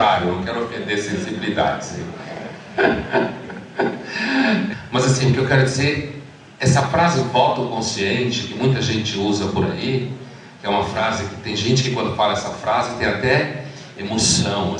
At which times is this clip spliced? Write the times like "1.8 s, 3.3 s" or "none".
4.7 s